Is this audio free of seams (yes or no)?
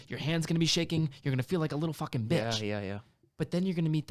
yes